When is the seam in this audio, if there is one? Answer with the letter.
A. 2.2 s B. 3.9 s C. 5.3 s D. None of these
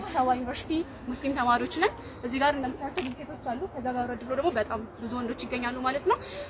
D